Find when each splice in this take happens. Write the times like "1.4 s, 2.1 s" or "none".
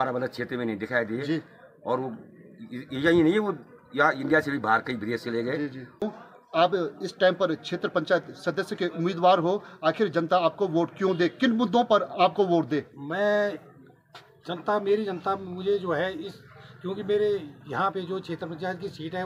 6.0 s

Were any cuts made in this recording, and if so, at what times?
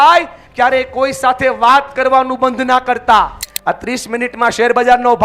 3.5 s

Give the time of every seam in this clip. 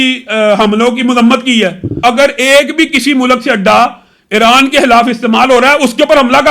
2.0 s

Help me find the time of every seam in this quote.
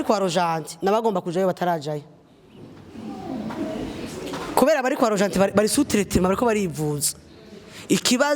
none

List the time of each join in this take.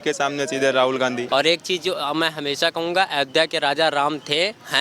1.3 s

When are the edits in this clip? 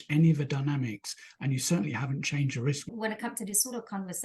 2.9 s

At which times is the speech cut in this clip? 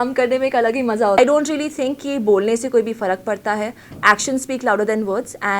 1.2 s

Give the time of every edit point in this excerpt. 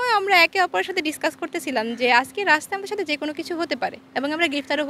none

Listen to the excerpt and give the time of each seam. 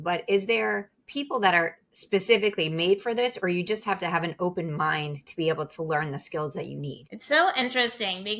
7.1 s

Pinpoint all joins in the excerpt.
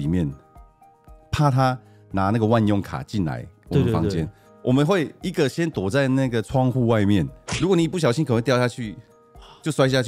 7.4 s

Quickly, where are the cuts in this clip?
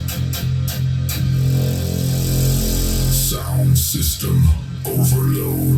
none

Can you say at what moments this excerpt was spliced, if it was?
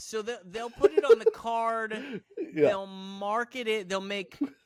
none

